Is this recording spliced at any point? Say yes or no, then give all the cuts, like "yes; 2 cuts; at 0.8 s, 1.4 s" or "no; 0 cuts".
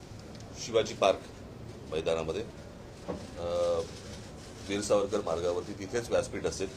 no; 0 cuts